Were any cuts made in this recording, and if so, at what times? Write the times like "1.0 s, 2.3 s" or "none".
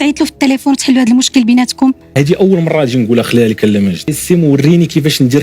2.1 s, 4.2 s